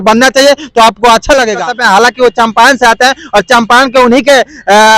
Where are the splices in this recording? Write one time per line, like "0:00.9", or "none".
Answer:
0:01.6